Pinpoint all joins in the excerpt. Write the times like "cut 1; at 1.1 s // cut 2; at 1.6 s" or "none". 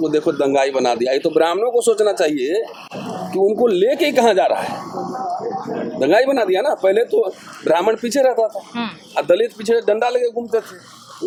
none